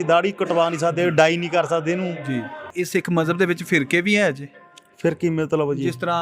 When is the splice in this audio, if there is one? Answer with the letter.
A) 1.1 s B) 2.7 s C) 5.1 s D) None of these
B